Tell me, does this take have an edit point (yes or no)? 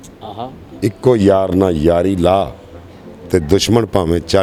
no